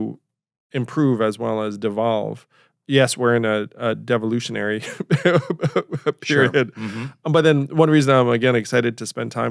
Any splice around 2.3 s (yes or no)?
no